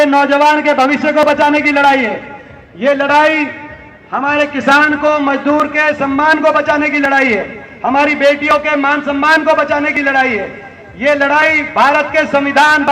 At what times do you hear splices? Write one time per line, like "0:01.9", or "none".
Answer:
none